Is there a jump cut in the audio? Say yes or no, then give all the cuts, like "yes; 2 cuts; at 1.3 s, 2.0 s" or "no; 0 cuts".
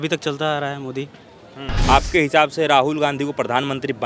yes; 1 cut; at 1.9 s